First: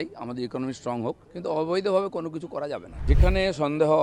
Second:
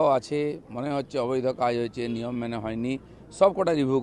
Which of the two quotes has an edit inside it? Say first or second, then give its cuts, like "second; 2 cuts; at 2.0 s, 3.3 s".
first; 2 cuts; at 1.3 s, 2.9 s